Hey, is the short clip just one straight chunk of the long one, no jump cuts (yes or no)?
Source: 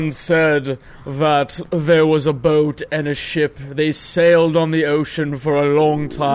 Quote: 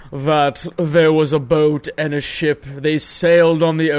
yes